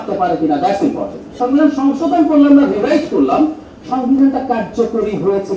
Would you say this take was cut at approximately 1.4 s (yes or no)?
yes